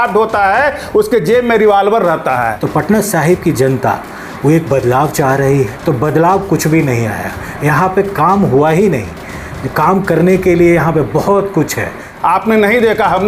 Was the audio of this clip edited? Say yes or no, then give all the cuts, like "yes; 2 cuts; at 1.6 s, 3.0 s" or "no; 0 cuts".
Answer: yes; 3 cuts; at 2.6 s, 5.7 s, 12.0 s